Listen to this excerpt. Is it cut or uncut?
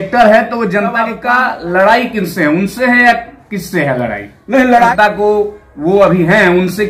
cut